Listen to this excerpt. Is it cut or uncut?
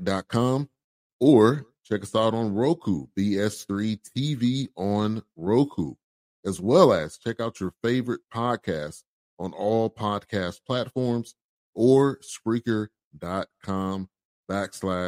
uncut